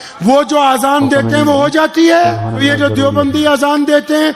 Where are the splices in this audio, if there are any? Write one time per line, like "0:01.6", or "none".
0:02.6